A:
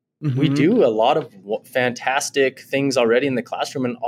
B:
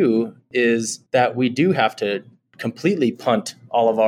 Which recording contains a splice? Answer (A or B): B